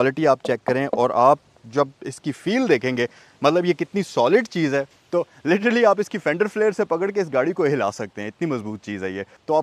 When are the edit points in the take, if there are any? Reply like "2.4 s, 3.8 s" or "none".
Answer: none